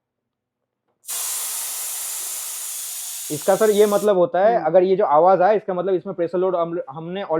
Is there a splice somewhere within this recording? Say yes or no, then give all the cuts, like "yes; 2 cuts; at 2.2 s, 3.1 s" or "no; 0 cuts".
no; 0 cuts